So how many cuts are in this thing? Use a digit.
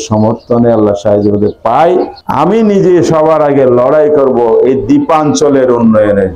1